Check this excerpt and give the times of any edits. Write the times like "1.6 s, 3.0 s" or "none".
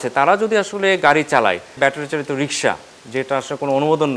1.8 s